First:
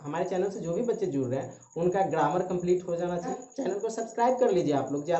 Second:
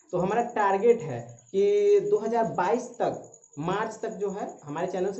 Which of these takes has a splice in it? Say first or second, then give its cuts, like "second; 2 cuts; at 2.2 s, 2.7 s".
first; 1 cut; at 3.4 s